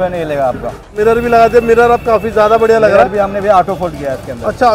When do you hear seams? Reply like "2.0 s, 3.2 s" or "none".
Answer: 0.9 s